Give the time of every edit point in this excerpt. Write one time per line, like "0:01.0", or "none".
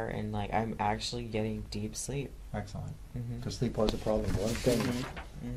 none